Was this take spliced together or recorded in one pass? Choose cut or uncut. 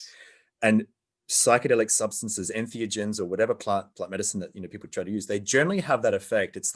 uncut